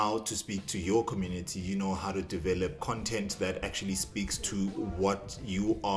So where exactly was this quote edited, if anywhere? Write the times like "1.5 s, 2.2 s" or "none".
2.8 s